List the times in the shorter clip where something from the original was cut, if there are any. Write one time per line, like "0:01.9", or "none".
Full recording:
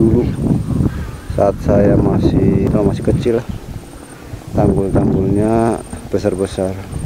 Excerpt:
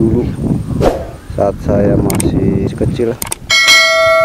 0:02.7